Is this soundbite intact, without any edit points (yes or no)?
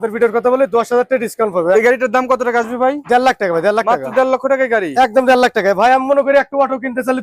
no